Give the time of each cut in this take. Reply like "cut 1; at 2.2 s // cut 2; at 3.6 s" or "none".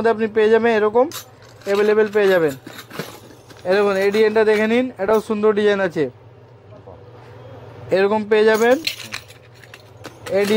none